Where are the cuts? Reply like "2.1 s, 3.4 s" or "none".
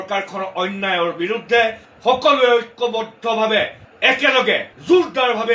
1.9 s